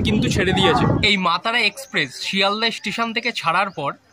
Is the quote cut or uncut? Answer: cut